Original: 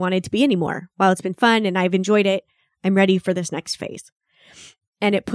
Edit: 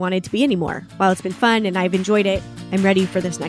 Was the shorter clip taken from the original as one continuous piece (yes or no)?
no